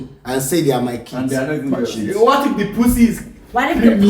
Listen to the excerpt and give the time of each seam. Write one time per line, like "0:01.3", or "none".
0:02.0